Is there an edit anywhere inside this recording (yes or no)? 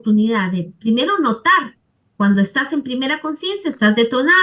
no